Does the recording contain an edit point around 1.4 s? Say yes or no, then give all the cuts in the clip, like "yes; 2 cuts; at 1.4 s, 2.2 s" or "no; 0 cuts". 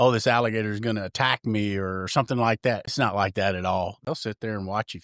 no; 2 cuts; at 2.9 s, 4.0 s